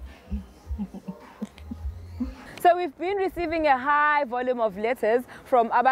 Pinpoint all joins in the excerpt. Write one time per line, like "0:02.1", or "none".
0:02.4